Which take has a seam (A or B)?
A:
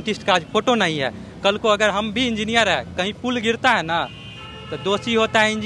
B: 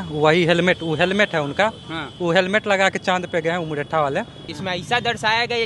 B